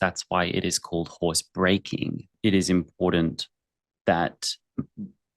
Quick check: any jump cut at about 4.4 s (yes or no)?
no